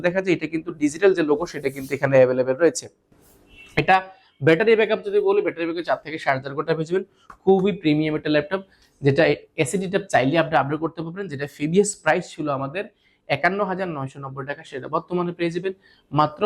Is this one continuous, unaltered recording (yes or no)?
yes